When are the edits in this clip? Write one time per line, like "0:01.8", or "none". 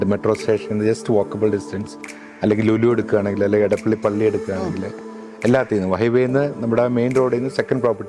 none